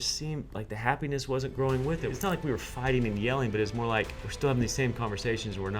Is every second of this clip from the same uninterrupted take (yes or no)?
no